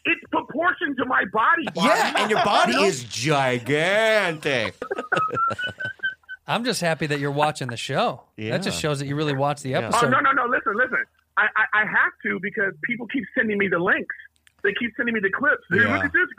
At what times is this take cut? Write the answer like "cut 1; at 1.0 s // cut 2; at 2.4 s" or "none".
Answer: cut 1; at 4.9 s